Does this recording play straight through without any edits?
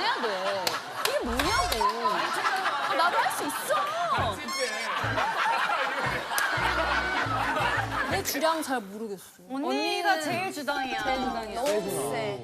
no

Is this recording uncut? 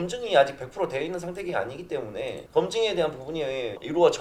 yes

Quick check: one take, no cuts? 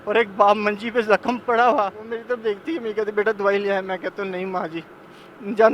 no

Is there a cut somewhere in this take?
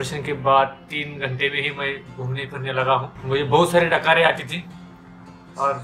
yes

